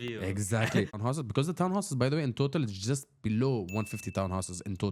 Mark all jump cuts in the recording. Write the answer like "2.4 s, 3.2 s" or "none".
0.9 s